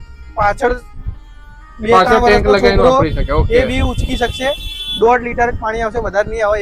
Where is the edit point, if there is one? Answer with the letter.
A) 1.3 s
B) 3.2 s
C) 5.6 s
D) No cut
D